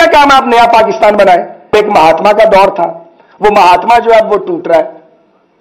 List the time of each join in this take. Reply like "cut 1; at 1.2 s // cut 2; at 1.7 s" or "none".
cut 1; at 1.7 s